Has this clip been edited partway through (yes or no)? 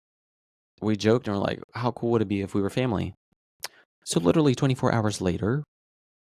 no